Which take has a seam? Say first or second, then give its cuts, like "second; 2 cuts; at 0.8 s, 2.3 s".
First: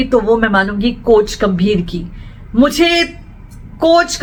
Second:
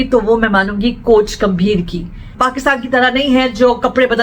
second; 1 cut; at 2.3 s